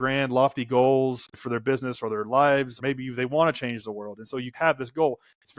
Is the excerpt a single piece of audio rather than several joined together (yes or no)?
no